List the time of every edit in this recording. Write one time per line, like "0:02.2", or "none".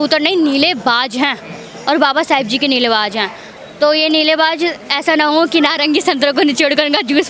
none